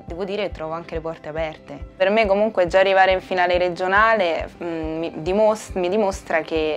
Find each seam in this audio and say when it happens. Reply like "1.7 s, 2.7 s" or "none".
1.9 s